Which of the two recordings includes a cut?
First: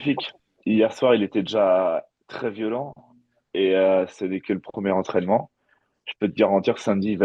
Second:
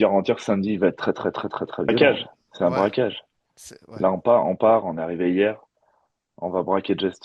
second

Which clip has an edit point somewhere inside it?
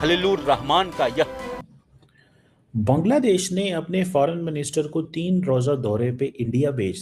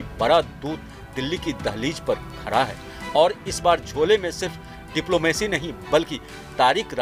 first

